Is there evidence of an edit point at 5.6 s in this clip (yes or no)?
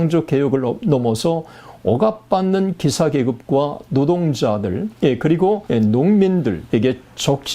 yes